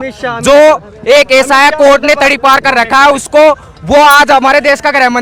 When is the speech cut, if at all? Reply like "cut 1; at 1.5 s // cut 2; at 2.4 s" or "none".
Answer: none